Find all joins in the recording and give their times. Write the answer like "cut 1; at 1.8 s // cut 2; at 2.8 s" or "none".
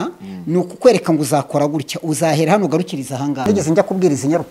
cut 1; at 3.4 s